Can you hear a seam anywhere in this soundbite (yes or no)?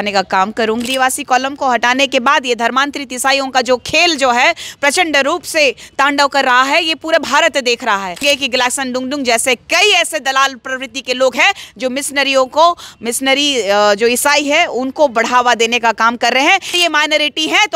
yes